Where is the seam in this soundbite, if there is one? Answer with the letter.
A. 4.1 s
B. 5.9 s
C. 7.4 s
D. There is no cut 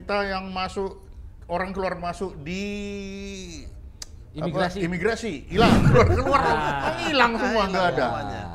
B